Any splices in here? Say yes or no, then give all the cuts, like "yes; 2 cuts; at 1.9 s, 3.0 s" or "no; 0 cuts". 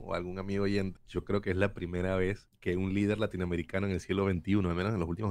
yes; 2 cuts; at 1.0 s, 2.5 s